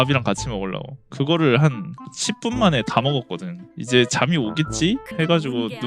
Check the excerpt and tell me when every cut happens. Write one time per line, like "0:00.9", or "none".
0:01.0
0:03.7